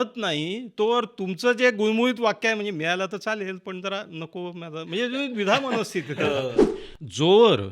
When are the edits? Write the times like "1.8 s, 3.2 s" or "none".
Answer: 6.7 s

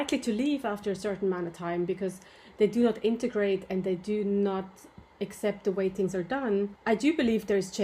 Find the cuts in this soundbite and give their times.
6.8 s

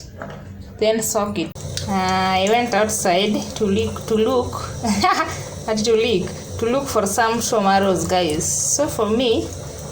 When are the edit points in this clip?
1.5 s

